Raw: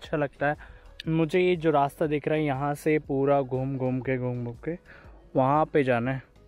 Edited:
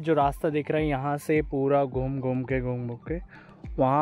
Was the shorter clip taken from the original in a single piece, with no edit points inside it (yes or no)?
yes